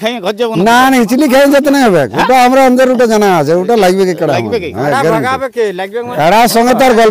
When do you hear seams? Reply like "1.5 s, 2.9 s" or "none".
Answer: 6.1 s